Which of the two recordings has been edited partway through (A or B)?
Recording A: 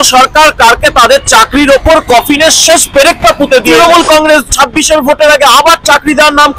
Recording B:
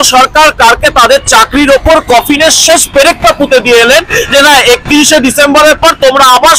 A